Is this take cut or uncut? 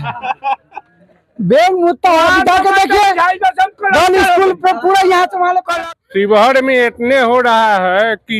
cut